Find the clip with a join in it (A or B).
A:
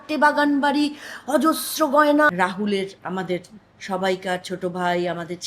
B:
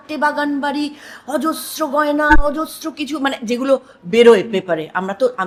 A